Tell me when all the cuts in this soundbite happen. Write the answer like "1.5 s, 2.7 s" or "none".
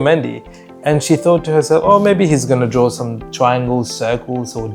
none